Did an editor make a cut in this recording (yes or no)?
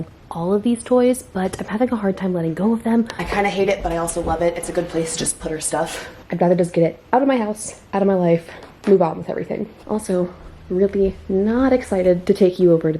yes